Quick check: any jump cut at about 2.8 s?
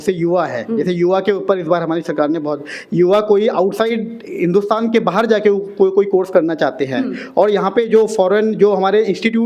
no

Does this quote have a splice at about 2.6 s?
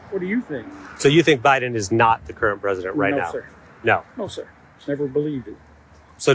yes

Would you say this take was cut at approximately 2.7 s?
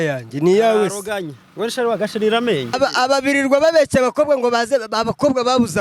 yes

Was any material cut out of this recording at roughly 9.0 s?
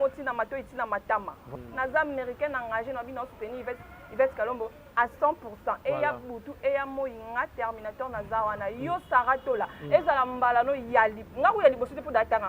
no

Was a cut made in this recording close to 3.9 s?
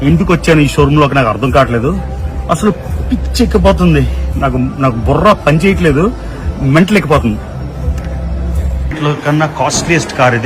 no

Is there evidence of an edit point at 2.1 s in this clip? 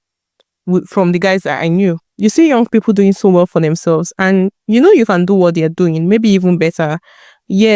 yes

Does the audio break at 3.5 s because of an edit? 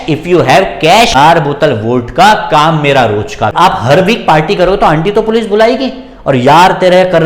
yes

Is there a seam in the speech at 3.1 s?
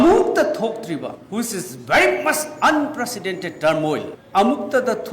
no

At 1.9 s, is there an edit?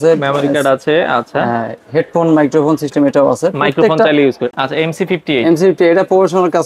no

